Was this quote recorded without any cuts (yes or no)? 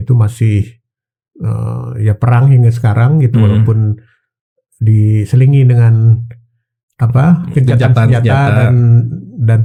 yes